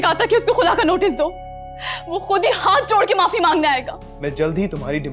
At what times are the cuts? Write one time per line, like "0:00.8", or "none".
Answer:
0:04.0